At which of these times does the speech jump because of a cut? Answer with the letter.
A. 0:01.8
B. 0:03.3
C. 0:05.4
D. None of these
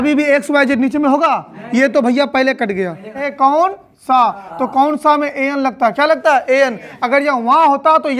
B